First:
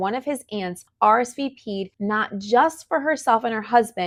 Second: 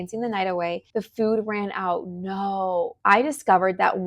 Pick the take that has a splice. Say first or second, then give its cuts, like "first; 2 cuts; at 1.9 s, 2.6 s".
second; 1 cut; at 2.9 s